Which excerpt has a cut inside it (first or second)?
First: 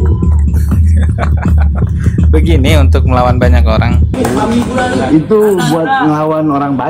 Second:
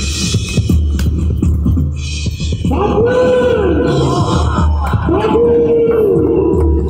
first